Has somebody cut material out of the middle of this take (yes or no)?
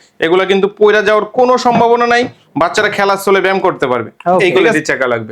yes